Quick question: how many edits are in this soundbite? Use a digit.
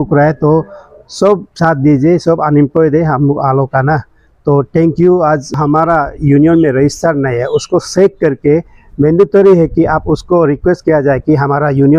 1